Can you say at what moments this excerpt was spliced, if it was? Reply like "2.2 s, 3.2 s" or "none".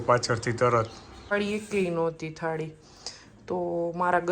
1.3 s

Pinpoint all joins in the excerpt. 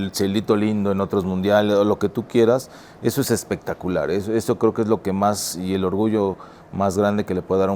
none

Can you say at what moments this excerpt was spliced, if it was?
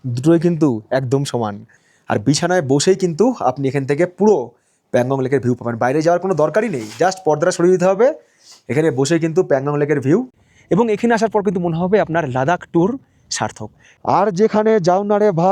1.6 s, 10.3 s, 13.9 s

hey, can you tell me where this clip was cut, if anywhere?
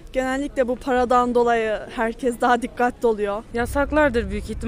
3.4 s

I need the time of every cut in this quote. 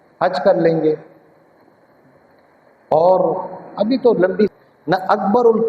4.5 s

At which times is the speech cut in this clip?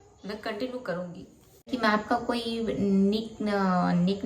1.7 s

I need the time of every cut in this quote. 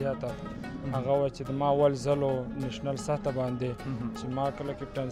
none

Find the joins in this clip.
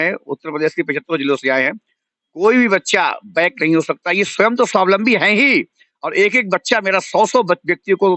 none

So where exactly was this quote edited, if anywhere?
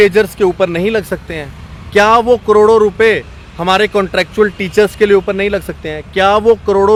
none

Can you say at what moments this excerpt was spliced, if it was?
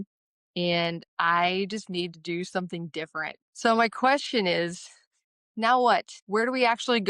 3.4 s, 6.2 s

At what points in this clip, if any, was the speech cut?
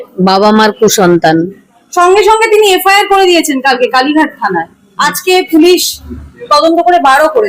none

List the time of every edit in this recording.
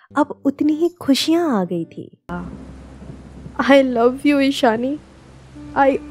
2.3 s

